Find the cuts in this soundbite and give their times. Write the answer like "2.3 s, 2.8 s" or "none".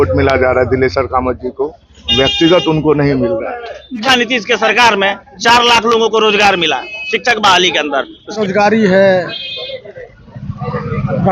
4.0 s, 8.4 s